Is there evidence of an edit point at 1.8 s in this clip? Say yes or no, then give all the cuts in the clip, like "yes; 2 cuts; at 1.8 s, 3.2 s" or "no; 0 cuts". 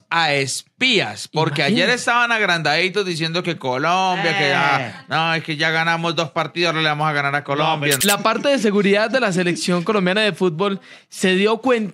no; 1 cut; at 8.0 s